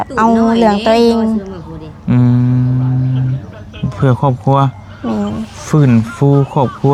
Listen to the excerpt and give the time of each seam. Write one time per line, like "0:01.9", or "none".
none